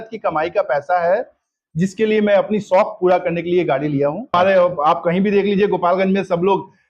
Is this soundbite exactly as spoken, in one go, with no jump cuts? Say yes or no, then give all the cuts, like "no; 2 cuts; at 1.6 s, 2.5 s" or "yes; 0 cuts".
no; 1 cut; at 4.3 s